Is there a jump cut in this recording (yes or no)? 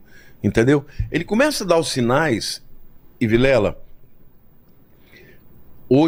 no